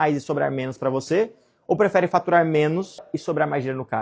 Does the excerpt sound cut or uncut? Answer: cut